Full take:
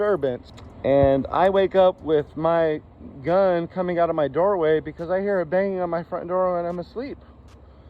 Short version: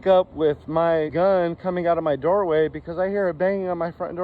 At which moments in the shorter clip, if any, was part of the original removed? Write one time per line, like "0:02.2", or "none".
0:01.1